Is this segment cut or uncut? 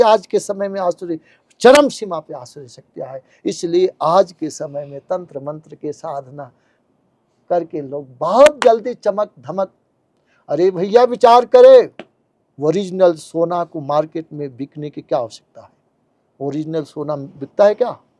uncut